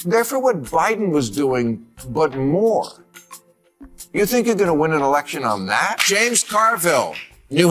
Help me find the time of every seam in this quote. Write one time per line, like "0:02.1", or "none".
0:06.1